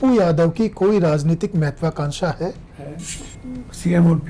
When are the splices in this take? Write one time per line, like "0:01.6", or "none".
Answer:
none